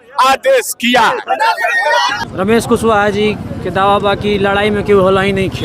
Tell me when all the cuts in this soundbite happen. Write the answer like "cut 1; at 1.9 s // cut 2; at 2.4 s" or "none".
cut 1; at 2.1 s